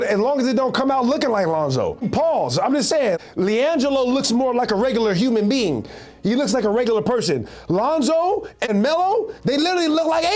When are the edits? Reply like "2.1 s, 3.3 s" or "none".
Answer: none